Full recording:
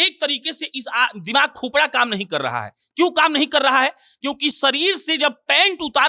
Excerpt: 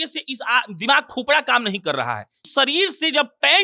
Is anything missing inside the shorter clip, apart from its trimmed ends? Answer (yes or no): yes